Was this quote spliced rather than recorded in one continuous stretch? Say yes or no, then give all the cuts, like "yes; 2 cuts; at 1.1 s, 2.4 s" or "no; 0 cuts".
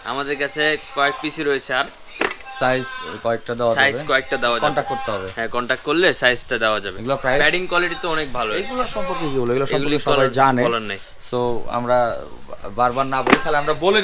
no; 0 cuts